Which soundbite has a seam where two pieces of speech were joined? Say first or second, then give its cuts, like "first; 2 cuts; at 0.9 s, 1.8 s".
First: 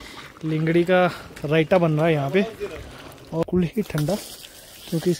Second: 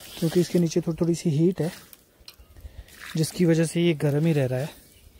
first; 1 cut; at 3.4 s